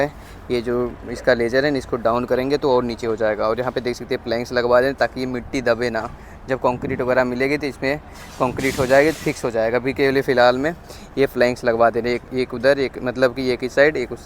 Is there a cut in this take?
no; 0 cuts

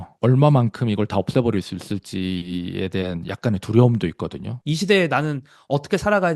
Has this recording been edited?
yes; 1 cut; at 4.5 s

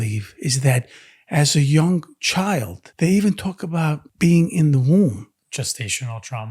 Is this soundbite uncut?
no; 3 cuts; at 2.8 s, 4.1 s, 5.4 s

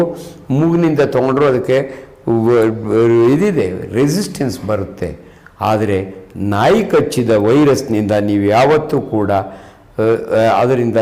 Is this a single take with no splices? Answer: yes; 0 cuts

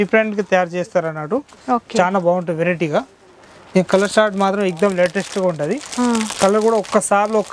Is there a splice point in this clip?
no; 0 cuts

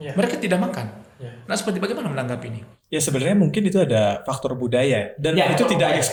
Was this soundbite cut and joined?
no; 0 cuts

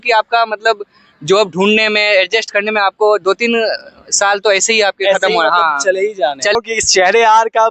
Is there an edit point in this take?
no; 0 cuts

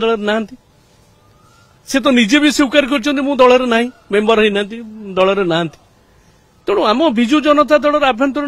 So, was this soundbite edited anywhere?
no; 0 cuts

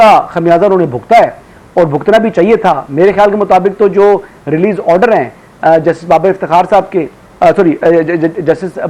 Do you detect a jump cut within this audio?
no; 0 cuts

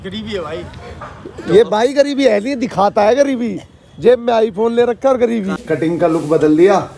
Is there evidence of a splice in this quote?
yes; 1 cut; at 5.6 s

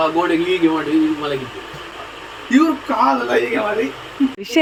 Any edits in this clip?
no; 0 cuts

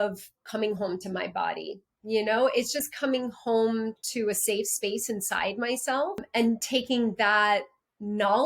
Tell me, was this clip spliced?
yes; 1 cut; at 6.2 s

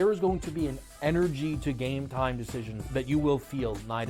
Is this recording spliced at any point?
no; 0 cuts

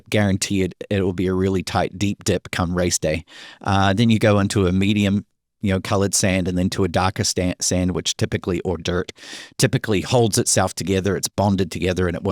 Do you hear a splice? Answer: no; 0 cuts

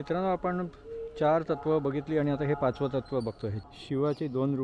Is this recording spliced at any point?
yes; 1 cut; at 3.5 s

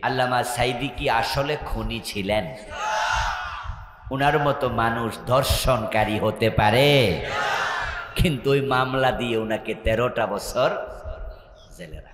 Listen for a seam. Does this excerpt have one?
no; 0 cuts

